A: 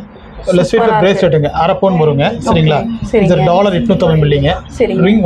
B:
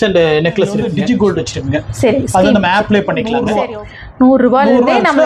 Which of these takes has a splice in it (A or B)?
B